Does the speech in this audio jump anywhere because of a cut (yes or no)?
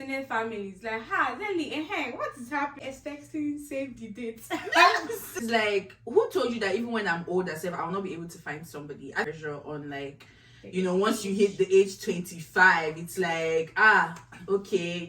yes